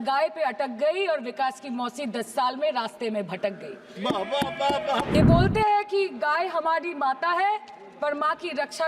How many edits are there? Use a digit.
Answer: 1